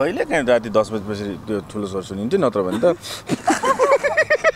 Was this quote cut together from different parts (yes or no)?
no